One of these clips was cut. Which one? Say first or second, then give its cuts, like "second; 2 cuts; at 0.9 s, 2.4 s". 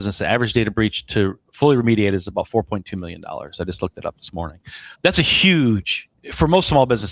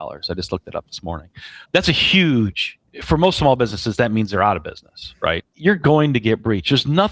second; 1 cut; at 5.5 s